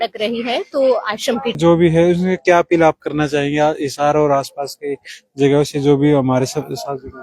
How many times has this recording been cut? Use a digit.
1